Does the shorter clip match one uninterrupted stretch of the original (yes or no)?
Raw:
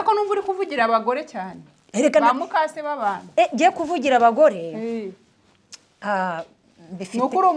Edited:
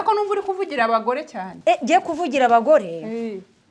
no